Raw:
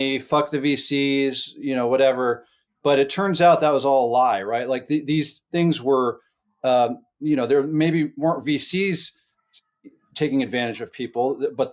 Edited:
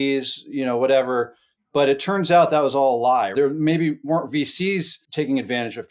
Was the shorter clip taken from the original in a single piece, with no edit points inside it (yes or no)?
no